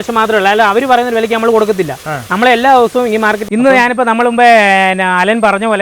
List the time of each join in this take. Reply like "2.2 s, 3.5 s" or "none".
3.4 s